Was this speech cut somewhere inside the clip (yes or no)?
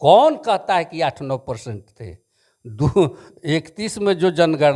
no